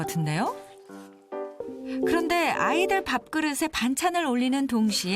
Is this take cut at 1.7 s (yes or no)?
yes